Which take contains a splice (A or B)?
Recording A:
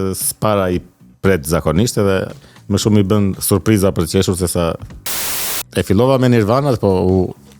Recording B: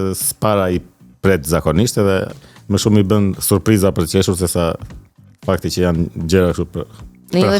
A